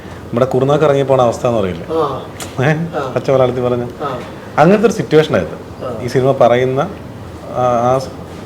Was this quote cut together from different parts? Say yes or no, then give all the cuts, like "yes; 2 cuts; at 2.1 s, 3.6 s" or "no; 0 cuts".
no; 0 cuts